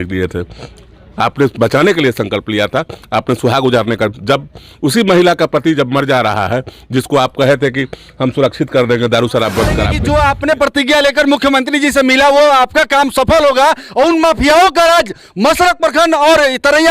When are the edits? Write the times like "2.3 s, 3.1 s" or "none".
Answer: 9.9 s